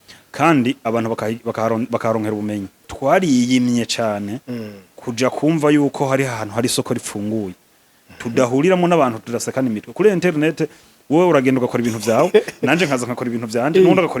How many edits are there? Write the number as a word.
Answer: one